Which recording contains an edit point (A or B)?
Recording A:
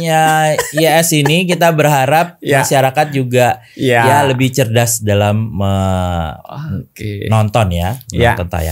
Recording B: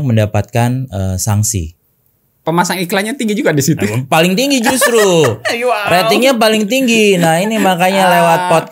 B